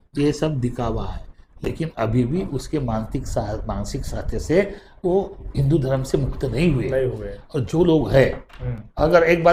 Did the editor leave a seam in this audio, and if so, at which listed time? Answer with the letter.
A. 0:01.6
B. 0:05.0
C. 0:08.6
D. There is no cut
D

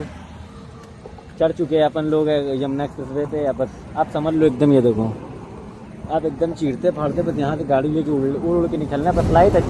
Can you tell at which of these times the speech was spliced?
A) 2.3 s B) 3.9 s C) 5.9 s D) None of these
D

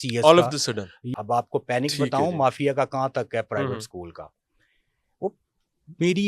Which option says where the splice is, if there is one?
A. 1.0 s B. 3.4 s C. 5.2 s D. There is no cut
A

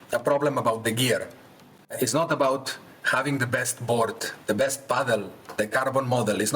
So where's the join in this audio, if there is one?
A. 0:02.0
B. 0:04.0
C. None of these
A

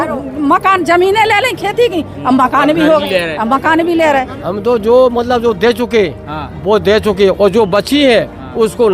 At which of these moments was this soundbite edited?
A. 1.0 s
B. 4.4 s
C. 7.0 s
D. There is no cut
B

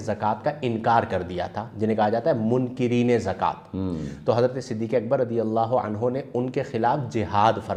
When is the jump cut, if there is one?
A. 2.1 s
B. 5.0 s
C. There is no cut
C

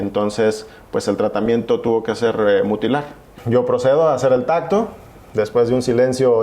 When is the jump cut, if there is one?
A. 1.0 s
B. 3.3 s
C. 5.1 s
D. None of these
B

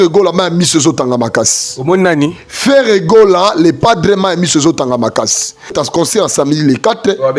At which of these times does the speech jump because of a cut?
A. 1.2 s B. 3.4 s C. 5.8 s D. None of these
C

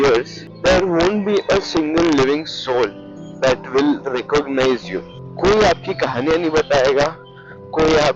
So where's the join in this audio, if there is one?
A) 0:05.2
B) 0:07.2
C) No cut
C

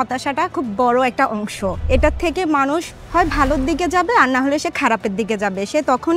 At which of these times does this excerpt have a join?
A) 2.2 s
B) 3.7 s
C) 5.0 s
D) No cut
D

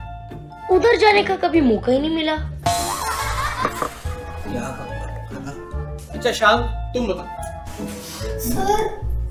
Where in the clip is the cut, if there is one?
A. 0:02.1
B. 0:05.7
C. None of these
C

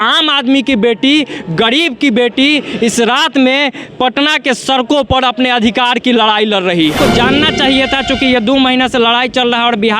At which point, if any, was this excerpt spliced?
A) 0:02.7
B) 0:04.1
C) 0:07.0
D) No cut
C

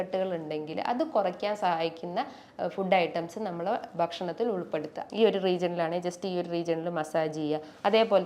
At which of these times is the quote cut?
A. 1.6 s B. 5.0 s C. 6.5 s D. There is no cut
B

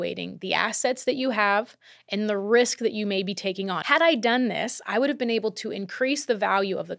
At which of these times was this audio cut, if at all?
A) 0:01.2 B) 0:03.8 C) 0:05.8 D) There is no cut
B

